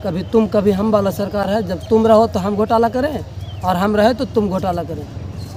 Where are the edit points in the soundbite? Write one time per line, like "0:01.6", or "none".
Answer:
none